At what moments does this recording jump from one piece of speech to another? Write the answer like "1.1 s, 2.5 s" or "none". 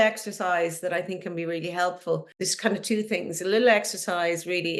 2.5 s